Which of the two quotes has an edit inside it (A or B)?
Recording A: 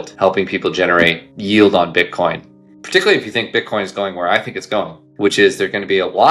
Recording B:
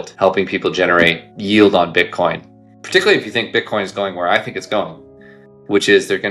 A